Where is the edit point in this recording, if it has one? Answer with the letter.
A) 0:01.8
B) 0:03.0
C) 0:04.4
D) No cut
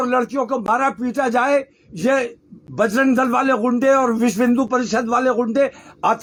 D